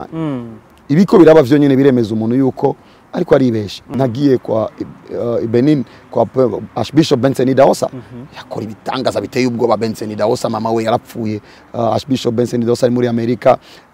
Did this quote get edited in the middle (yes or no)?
yes